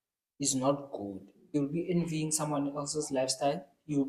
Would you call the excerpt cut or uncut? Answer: cut